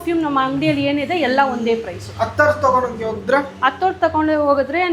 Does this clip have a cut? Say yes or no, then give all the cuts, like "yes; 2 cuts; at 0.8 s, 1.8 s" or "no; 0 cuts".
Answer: no; 0 cuts